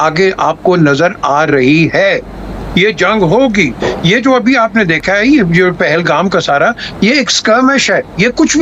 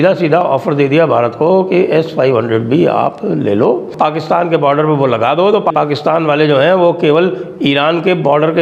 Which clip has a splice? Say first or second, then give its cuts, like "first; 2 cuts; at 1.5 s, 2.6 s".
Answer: second; 2 cuts; at 3.9 s, 5.7 s